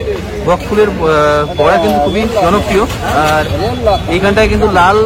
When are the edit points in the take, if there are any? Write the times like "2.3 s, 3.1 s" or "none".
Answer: none